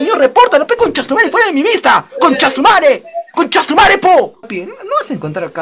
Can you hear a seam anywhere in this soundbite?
yes; 1 cut; at 4.5 s

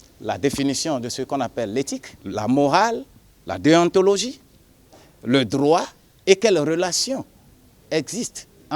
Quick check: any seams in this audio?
yes; 1 cut; at 2.1 s

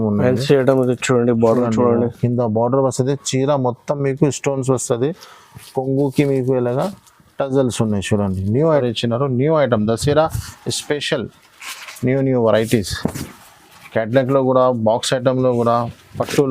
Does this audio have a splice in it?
yes; 1 cut; at 8.8 s

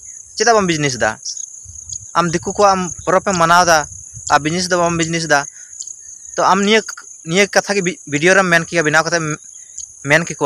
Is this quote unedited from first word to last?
yes; 0 cuts

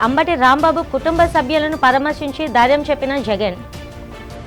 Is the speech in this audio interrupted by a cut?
no; 0 cuts

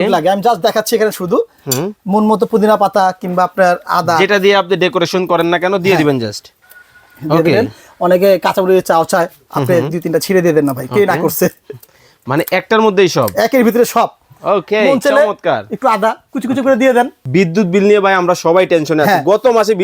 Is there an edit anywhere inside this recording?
yes; 1 cut; at 17.2 s

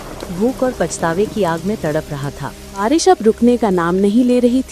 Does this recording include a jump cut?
yes; 1 cut; at 2.8 s

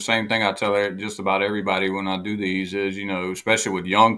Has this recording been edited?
no; 0 cuts

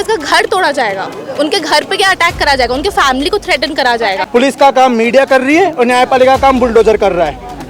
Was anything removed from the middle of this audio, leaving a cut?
yes; 1 cut; at 4.2 s

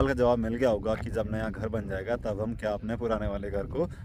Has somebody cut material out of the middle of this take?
no; 0 cuts

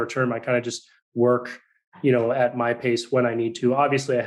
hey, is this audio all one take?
yes; 0 cuts

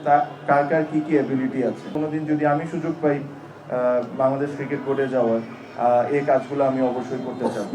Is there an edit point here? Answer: yes; 1 cut; at 1.9 s

